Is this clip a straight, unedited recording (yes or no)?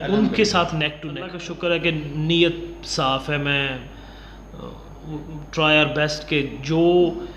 no